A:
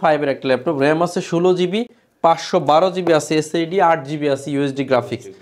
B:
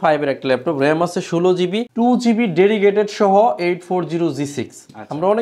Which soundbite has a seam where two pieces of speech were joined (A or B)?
B